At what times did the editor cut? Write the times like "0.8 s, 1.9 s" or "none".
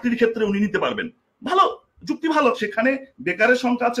2.6 s